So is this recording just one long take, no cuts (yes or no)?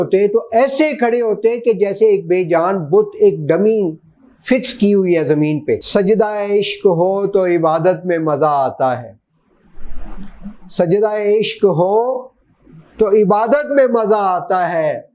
no